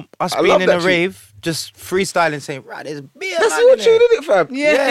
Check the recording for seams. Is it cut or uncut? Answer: uncut